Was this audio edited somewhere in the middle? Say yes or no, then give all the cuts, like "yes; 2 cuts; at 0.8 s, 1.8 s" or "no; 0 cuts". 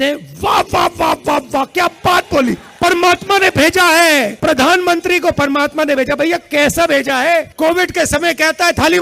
yes; 3 cuts; at 2.7 s, 4.3 s, 7.5 s